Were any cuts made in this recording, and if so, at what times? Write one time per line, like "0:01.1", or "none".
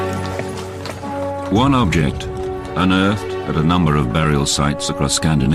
none